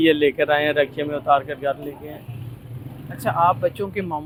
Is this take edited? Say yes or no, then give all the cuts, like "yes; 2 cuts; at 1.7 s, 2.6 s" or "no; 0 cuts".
no; 0 cuts